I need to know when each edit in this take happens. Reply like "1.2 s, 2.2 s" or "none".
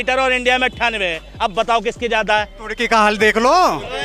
none